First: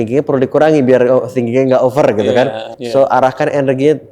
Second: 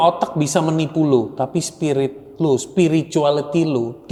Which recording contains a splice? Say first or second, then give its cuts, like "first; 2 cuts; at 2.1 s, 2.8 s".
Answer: first; 1 cut; at 2.7 s